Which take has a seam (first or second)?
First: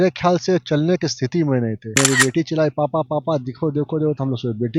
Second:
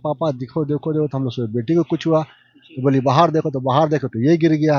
first